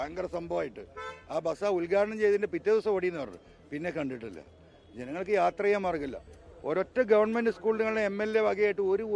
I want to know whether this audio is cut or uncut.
uncut